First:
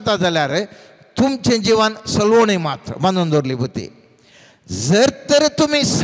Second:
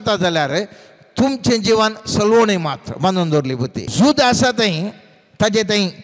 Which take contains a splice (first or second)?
second